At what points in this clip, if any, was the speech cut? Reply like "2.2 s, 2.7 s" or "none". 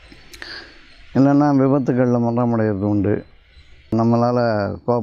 3.9 s